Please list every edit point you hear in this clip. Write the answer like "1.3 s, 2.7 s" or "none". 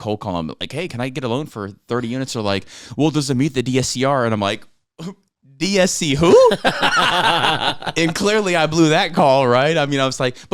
none